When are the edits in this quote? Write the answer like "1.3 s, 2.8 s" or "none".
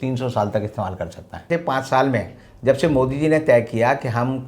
1.4 s